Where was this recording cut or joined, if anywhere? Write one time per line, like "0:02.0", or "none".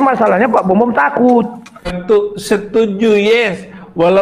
0:01.6